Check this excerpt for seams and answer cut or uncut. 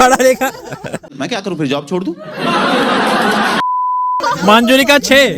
cut